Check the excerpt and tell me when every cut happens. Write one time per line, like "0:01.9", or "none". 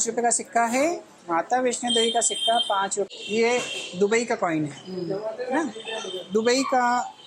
0:03.1